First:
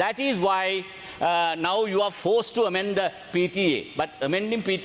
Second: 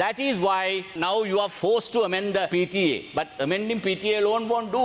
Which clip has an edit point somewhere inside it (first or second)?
second